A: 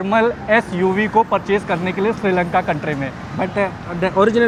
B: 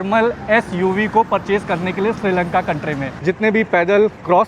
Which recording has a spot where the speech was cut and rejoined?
B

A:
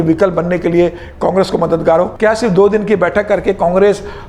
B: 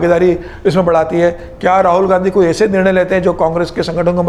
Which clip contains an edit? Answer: A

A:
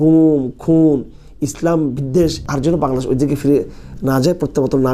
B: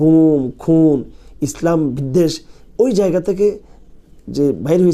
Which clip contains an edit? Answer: A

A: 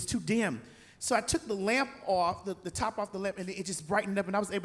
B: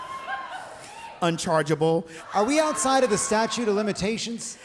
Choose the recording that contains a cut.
B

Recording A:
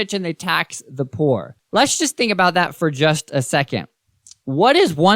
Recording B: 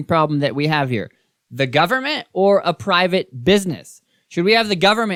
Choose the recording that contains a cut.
A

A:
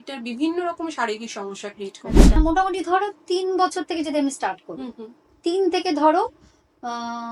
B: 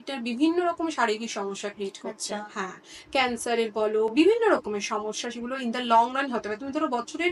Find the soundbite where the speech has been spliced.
A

